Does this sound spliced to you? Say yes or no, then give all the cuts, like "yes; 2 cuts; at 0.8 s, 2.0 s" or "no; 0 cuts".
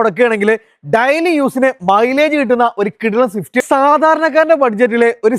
yes; 1 cut; at 3.6 s